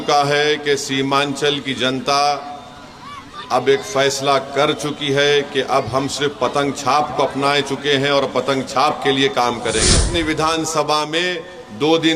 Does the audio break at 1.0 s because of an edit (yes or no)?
no